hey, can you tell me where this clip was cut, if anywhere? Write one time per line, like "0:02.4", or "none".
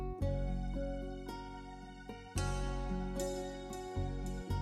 none